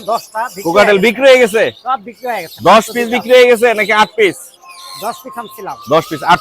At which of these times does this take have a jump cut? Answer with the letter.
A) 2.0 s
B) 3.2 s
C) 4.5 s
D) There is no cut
D